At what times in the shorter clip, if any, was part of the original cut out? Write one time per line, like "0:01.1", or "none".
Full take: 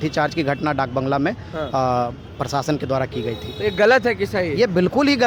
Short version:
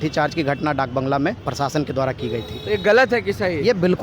0:01.4